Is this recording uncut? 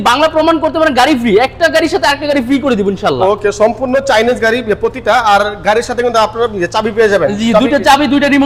yes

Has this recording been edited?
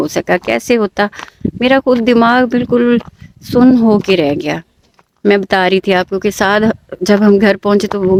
no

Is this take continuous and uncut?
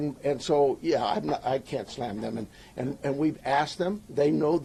yes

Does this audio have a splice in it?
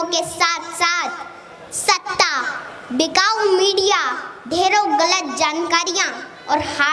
no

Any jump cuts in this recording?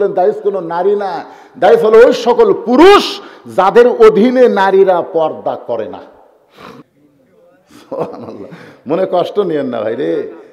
yes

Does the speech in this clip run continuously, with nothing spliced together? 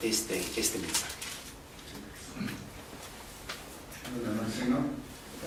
yes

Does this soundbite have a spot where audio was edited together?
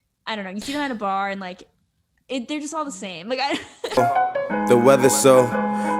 yes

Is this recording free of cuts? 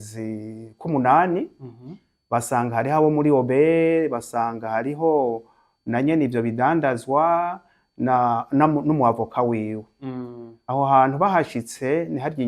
yes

